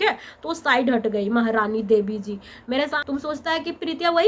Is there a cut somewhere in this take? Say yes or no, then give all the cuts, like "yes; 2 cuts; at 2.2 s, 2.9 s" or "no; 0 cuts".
yes; 1 cut; at 3.0 s